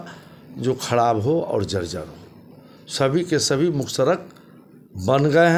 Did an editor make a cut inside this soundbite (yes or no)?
no